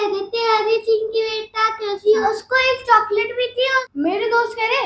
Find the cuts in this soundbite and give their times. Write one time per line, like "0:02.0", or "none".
0:02.2
0:03.9

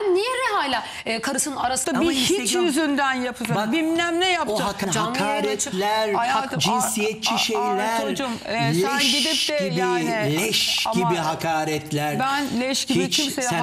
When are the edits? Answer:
0:01.8
0:04.9

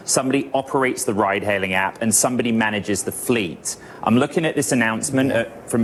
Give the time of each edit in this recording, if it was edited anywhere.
none

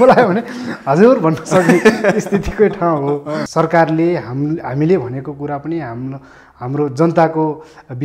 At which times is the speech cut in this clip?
0:03.5

